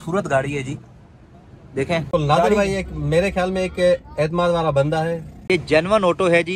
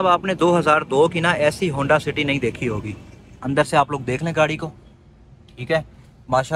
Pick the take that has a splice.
first; 2 cuts; at 2.1 s, 5.4 s

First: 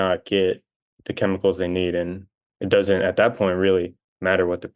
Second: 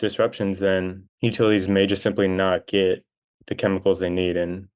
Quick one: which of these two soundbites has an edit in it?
second; 1 cut; at 1.0 s

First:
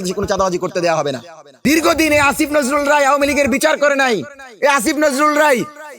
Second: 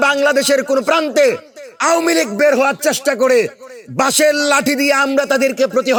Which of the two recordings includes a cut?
first; 1 cut; at 1.6 s

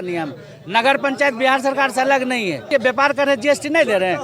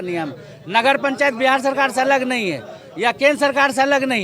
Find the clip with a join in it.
first; 1 cut; at 2.7 s

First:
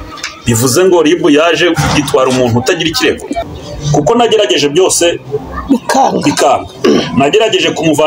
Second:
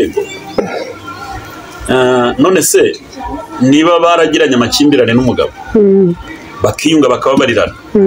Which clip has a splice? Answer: first; 1 cut; at 3.4 s

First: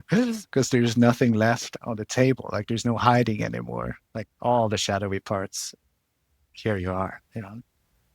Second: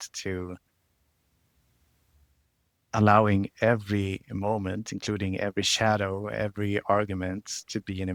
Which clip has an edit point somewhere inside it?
first; 1 cut; at 1.7 s

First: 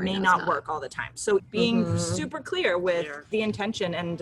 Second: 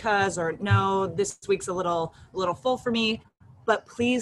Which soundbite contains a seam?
first; 2 cuts; at 1.4 s, 3.2 s

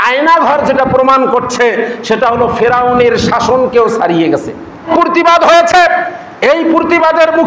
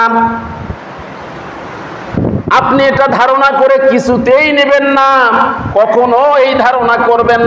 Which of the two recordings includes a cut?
first; 1 cut; at 4.9 s

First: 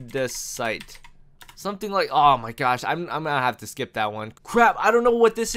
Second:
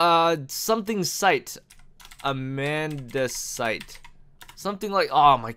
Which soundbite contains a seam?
first; 1 cut; at 4.3 s

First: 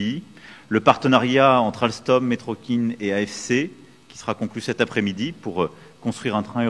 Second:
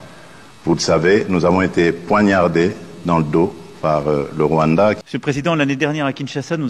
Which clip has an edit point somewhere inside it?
second; 1 cut; at 5.0 s

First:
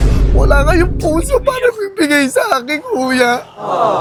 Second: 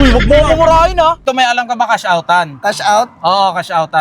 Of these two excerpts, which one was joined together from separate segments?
second; 1 cut; at 1.2 s

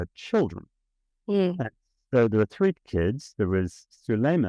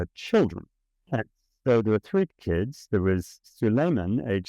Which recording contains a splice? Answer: second; 1 cut; at 1.1 s

